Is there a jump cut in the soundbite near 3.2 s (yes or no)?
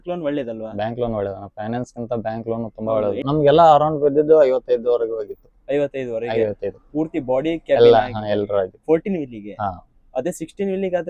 yes